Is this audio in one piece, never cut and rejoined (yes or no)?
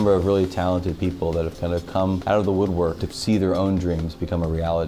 no